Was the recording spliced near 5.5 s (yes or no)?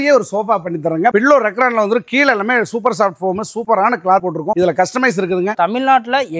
yes